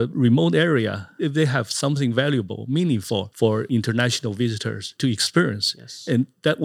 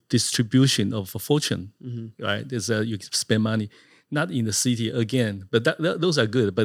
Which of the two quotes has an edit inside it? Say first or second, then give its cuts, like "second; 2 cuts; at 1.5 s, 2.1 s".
first; 3 cuts; at 1.2 s, 3.6 s, 4.9 s